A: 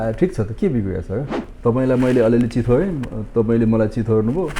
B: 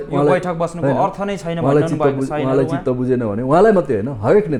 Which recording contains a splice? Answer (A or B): A